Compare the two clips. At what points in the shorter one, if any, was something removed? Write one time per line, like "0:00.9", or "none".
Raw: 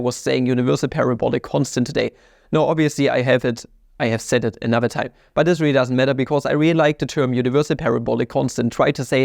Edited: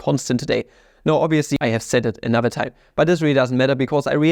0:01.6

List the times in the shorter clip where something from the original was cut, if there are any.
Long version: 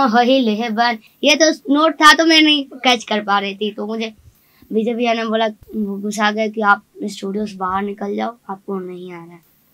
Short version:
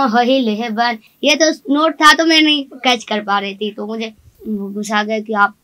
0:04.4

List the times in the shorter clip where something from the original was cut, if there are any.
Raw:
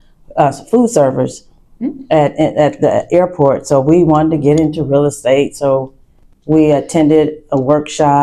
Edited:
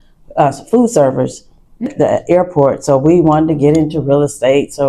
0:01.9

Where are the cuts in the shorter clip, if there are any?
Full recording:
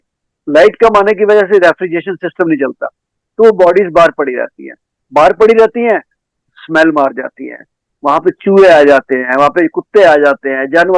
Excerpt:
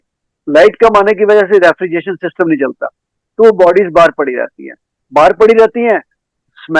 none

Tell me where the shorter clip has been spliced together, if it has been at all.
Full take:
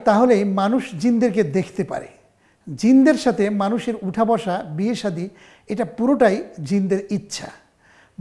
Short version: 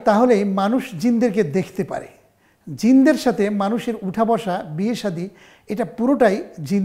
none

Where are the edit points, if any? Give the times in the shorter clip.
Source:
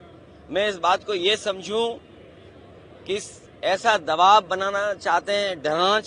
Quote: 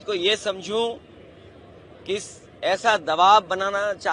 none

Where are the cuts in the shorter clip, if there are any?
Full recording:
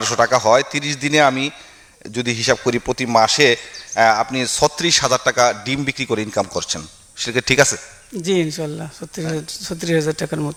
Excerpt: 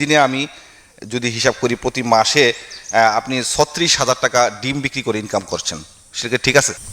none

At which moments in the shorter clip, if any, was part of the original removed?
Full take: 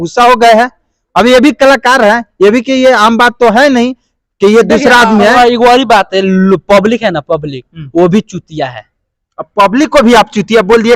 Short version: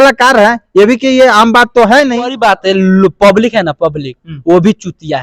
0:02.4

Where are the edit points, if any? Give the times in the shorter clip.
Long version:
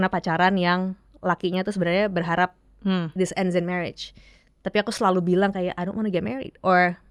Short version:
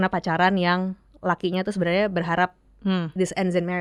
none

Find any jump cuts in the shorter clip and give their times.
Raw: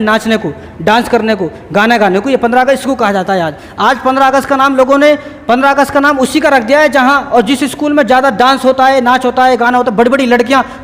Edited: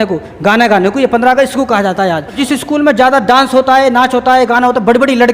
0:02.4

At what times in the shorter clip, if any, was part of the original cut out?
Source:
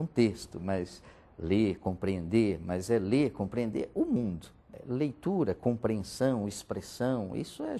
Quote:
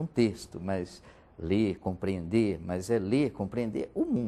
none

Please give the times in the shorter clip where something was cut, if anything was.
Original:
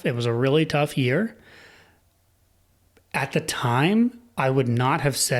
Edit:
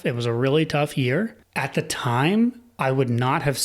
0:01.4

